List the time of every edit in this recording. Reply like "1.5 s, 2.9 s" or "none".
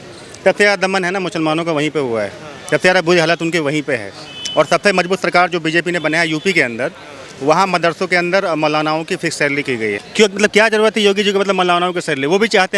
10.0 s